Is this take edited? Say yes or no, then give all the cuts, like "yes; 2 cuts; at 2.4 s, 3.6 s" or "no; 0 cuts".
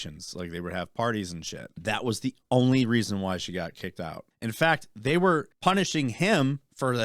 yes; 3 cuts; at 1.8 s, 4.2 s, 5.5 s